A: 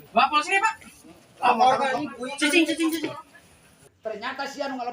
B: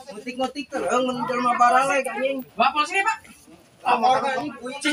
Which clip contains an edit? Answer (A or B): A